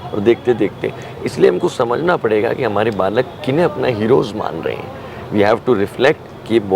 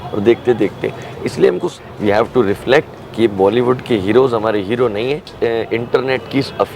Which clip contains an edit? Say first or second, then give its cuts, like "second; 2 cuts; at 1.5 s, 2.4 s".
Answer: second; 2 cuts; at 1.7 s, 5.3 s